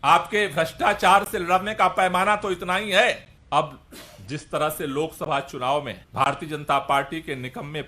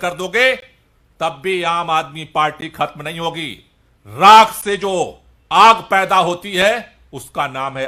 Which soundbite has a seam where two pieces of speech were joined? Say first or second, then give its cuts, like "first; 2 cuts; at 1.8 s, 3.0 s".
first; 2 cuts; at 3.3 s, 6.0 s